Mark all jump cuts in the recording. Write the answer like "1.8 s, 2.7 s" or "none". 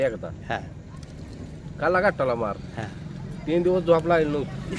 none